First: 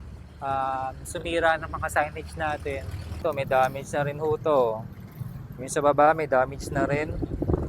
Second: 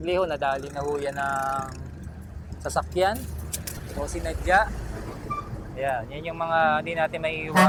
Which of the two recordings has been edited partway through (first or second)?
first